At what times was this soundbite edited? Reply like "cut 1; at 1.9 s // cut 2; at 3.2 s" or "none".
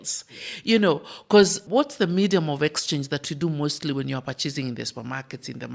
cut 1; at 1.6 s